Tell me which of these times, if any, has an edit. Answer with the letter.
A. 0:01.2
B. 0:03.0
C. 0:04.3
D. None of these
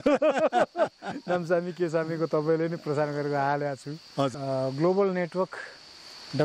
C